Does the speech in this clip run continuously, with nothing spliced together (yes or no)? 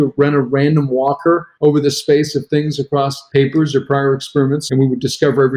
no